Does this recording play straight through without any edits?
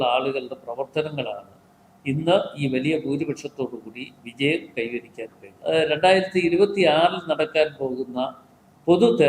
no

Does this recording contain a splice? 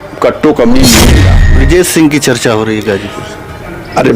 yes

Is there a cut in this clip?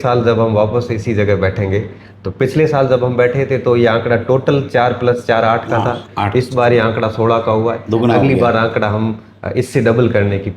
no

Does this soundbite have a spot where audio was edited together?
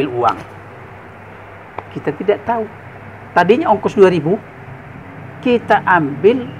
no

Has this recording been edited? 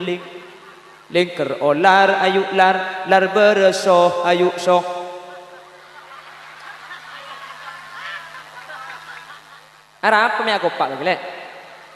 no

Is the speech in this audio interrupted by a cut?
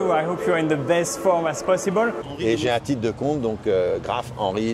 yes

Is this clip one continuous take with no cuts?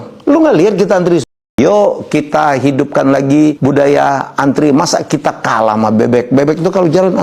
no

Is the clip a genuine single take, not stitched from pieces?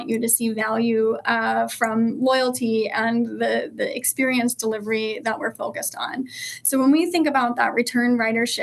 yes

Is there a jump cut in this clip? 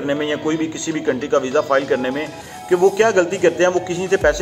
no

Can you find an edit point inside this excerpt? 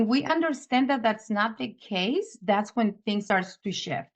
yes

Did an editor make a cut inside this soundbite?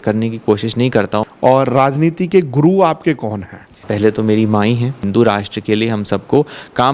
yes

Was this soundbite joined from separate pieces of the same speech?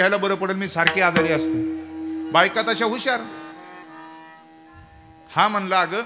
no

